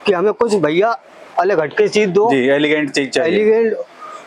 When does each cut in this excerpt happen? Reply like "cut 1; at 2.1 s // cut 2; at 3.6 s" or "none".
none